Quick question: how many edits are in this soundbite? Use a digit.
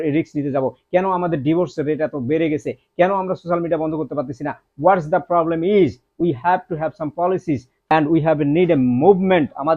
1